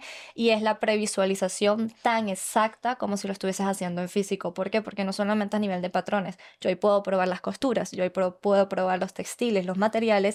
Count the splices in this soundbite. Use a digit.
0